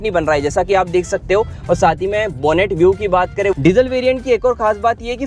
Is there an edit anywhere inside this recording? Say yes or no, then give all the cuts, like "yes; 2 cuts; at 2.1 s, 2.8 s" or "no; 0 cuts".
yes; 1 cut; at 3.5 s